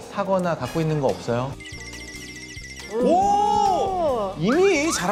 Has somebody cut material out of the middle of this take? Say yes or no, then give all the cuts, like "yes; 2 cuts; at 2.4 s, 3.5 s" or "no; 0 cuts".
no; 0 cuts